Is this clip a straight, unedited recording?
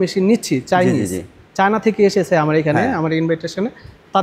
yes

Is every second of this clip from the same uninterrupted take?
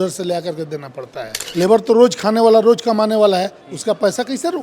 no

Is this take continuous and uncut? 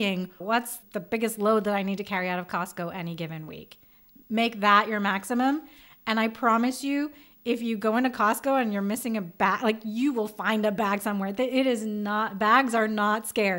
yes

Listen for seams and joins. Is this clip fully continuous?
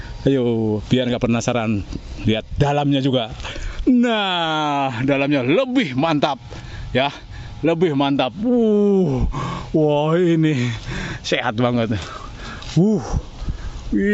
yes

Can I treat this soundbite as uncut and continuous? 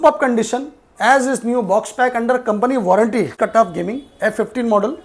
no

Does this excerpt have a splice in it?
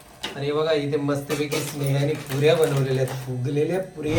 no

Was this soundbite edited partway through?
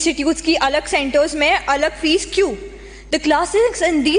no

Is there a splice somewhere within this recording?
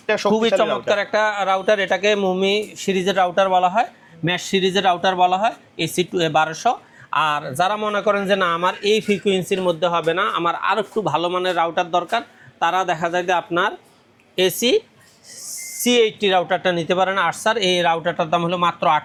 no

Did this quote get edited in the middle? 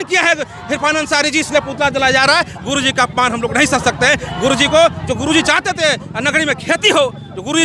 no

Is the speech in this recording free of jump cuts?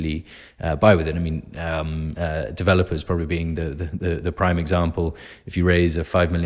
yes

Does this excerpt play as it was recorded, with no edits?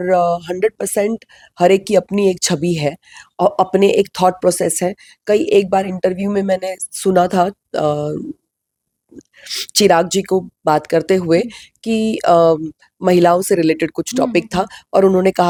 yes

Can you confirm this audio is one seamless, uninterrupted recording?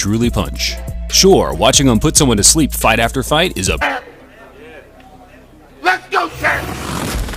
yes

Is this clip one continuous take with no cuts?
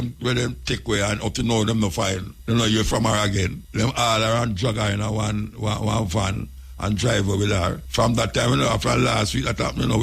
no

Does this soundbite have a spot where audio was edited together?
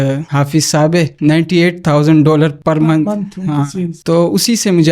yes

